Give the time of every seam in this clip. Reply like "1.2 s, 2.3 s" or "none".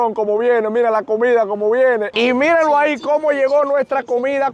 2.1 s

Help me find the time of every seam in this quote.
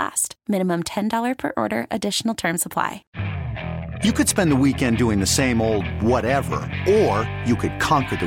3.0 s

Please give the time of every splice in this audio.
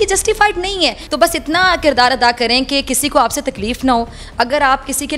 1.0 s

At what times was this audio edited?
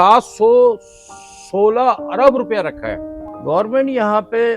3.3 s

